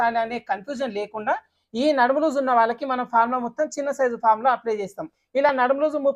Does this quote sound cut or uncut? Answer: cut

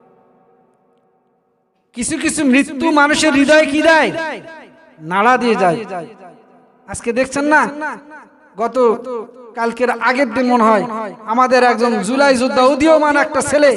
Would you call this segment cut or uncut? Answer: cut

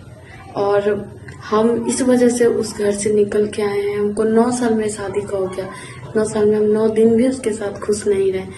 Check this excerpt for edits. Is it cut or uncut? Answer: uncut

